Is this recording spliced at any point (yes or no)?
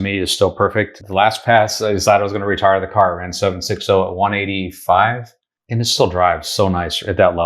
yes